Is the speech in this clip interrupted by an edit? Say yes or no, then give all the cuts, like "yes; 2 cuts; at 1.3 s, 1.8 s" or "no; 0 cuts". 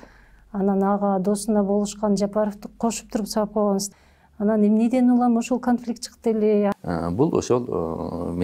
yes; 2 cuts; at 3.9 s, 6.7 s